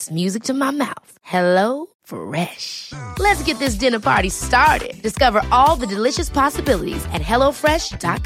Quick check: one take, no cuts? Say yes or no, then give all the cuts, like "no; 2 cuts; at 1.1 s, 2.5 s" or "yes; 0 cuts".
yes; 0 cuts